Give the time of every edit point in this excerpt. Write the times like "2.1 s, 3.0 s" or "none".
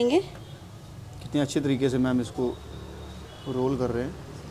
none